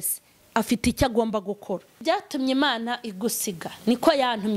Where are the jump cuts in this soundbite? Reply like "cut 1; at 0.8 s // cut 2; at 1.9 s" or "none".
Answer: cut 1; at 2.0 s